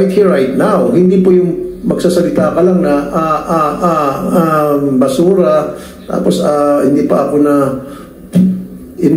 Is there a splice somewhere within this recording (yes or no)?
no